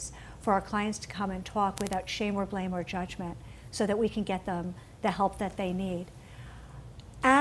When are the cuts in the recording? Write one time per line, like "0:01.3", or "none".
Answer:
0:02.1